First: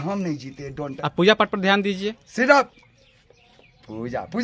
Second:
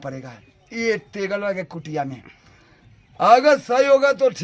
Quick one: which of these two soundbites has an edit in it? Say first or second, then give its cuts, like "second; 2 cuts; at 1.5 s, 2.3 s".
first; 1 cut; at 1.0 s